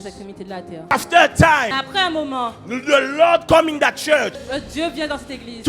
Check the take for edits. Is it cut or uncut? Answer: cut